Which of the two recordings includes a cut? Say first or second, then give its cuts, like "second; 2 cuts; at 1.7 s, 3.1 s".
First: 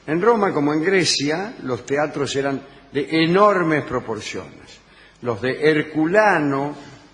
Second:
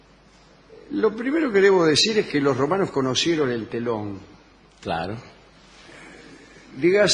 first; 1 cut; at 3.2 s